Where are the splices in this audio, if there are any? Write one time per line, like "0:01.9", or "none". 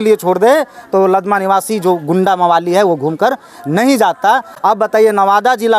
none